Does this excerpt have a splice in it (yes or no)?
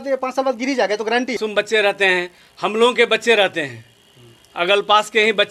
yes